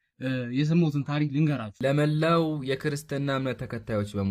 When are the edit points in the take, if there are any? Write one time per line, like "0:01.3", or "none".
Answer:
0:01.7